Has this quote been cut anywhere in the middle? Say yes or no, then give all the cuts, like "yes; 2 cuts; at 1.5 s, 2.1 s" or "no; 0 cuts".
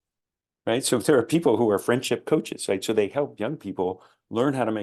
no; 0 cuts